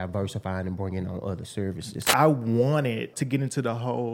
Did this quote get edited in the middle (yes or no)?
yes